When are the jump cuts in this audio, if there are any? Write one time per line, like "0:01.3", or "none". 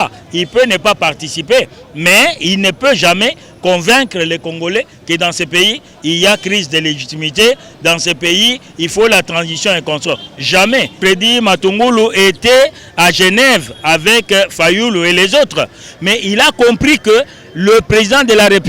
0:11.0